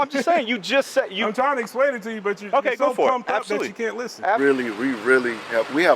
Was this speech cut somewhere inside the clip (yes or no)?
yes